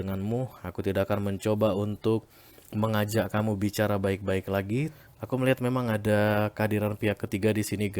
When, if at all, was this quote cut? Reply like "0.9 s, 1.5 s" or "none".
5.0 s